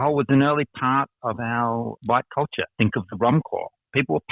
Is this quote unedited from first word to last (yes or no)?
no